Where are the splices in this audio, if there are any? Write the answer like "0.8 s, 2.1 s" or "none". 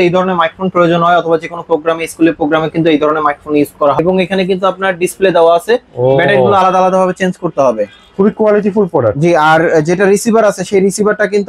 4.0 s